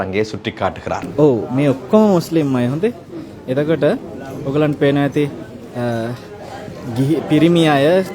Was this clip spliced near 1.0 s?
yes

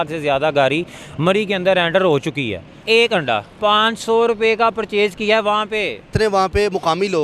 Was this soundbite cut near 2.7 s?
yes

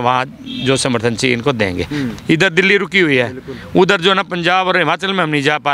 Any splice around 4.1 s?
no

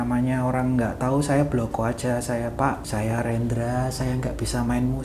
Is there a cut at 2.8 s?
yes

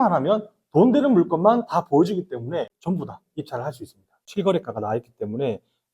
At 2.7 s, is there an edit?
yes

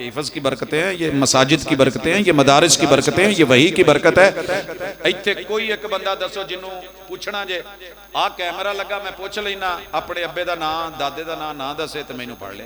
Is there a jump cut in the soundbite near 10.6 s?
no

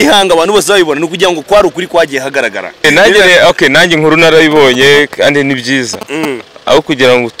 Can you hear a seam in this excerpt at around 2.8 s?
yes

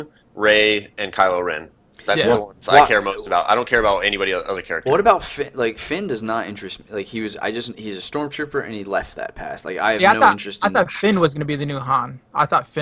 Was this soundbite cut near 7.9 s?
no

